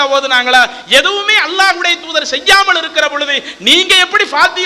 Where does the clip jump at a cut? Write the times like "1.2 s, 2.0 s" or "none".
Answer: none